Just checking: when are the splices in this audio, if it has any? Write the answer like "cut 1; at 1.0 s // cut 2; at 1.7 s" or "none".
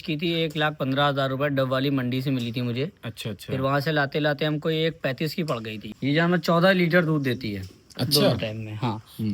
cut 1; at 5.9 s

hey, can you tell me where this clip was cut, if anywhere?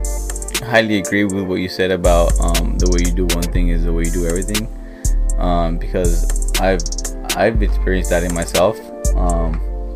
none

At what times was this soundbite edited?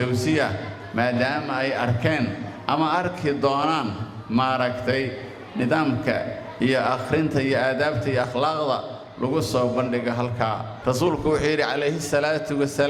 cut 1; at 10.7 s

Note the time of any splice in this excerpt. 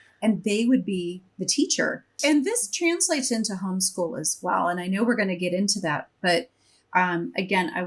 cut 1; at 2.1 s

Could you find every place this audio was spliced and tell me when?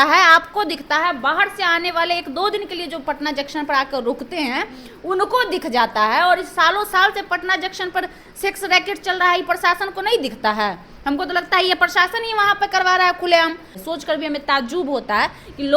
cut 1; at 13.7 s

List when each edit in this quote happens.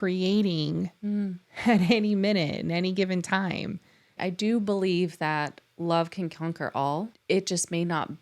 cut 1; at 4.2 s // cut 2; at 7.1 s

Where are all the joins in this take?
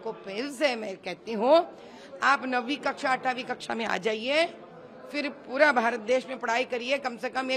none

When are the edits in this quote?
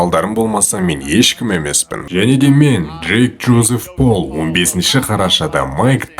cut 1; at 2.0 s

